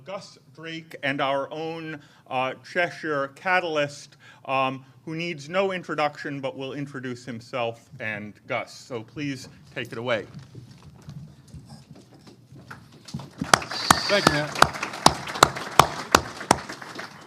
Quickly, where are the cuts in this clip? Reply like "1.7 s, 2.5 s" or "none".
none